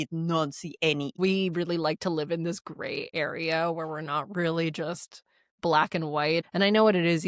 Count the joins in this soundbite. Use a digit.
2